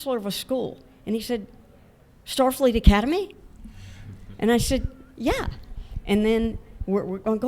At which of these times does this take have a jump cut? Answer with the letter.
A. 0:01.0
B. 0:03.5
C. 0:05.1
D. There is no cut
D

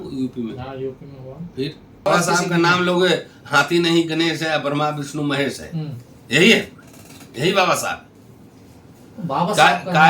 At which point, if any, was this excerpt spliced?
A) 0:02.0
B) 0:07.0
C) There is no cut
A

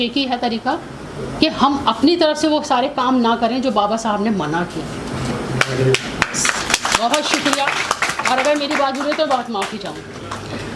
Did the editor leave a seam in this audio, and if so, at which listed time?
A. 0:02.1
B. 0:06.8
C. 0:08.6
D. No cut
D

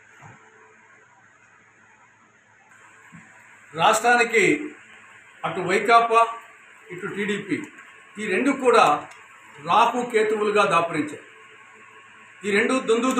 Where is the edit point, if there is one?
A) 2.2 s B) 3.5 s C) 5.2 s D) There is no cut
A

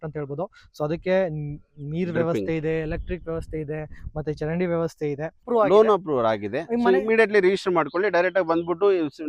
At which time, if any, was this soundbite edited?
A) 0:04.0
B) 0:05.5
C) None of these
B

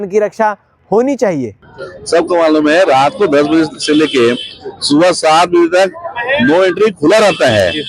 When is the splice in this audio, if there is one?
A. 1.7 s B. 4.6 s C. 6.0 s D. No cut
A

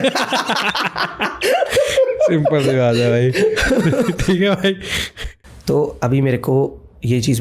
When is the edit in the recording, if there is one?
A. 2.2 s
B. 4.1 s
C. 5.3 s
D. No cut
D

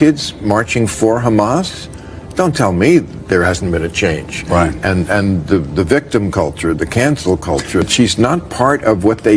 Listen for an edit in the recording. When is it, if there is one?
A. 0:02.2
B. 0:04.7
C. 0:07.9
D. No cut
C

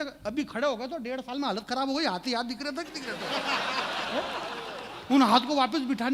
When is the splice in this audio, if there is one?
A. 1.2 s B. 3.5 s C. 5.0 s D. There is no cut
D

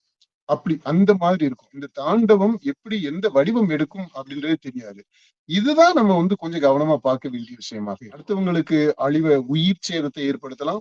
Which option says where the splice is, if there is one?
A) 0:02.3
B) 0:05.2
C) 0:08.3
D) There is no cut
C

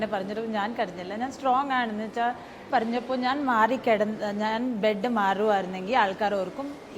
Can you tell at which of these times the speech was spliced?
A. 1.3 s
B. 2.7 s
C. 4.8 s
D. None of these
B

